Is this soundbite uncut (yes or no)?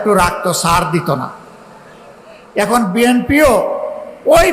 yes